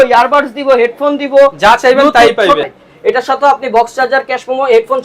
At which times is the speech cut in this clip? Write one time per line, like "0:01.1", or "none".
0:02.7